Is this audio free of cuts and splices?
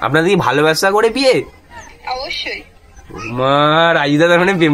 yes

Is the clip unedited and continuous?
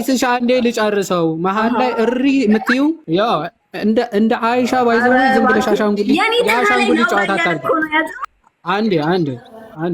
no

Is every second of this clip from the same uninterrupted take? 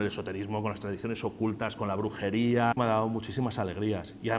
no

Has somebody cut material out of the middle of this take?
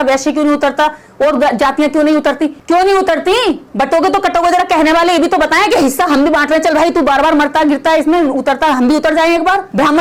no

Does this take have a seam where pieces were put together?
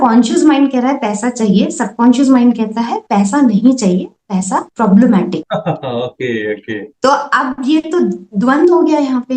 no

